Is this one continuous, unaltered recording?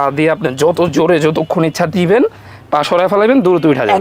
yes; 0 cuts

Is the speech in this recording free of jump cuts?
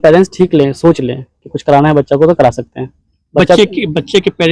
yes; 0 cuts

